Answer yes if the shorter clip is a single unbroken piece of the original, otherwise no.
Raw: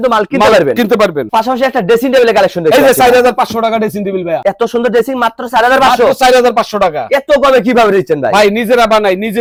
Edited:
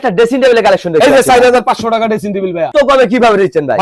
no